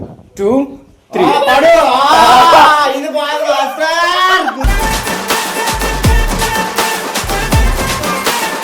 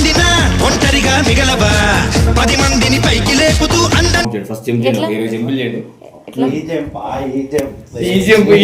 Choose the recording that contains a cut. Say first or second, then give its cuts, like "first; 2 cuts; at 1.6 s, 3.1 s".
second; 1 cut; at 4.3 s